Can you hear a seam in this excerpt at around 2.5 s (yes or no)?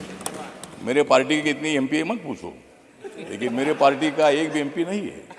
no